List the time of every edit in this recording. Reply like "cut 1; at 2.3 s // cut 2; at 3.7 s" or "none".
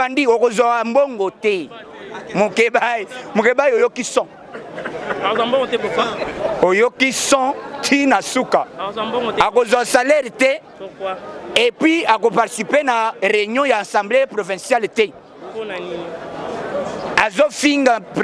none